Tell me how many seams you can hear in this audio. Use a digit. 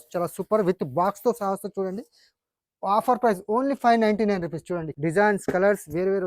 1